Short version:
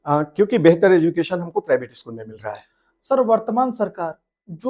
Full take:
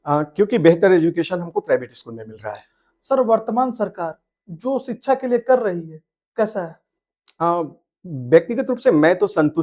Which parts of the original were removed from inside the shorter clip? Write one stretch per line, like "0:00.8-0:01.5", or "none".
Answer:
none